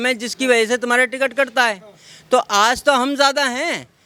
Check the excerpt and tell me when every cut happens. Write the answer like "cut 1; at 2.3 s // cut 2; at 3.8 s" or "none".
none